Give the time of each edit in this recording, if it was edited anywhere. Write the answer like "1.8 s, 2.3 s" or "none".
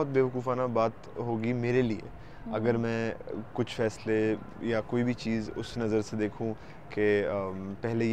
none